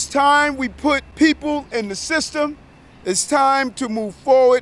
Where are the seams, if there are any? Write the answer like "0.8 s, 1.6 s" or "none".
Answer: 1.1 s